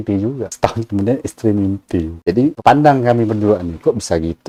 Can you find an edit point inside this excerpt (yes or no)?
no